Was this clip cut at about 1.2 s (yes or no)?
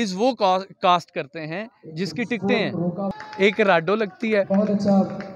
no